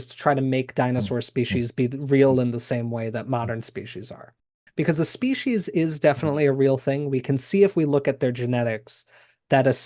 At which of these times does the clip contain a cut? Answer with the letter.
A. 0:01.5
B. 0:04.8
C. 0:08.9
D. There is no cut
D